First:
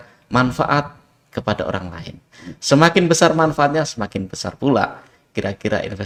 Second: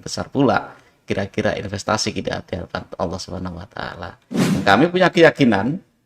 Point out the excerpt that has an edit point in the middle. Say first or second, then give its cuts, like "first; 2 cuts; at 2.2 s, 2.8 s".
second; 1 cut; at 4.6 s